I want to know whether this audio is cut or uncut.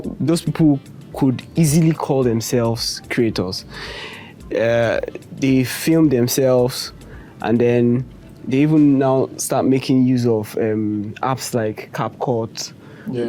uncut